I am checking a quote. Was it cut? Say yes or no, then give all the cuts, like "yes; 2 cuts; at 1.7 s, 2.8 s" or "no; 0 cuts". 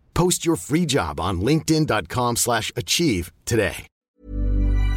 yes; 1 cut; at 4.0 s